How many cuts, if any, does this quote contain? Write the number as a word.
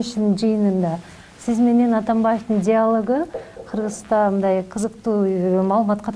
zero